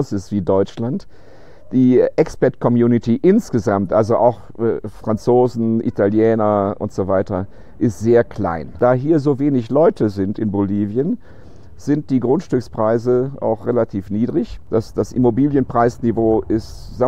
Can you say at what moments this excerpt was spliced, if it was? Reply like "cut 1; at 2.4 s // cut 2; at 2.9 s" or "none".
cut 1; at 8.7 s // cut 2; at 14.6 s